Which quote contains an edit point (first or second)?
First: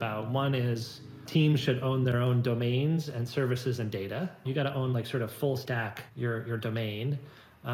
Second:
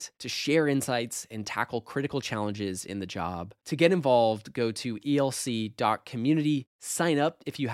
first